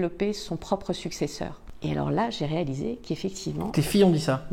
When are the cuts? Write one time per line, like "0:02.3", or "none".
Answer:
0:01.6